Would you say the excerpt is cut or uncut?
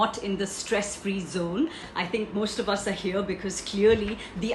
cut